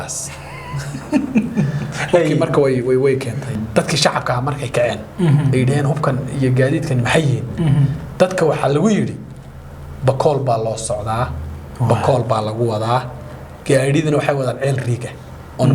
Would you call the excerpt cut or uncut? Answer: cut